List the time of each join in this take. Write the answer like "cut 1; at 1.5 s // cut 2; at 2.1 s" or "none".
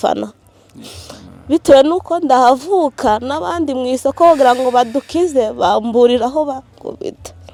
none